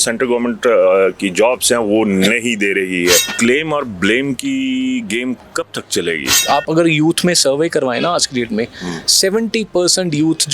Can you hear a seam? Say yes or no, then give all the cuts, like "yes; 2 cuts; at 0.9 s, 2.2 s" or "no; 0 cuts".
yes; 2 cuts; at 3.3 s, 6.4 s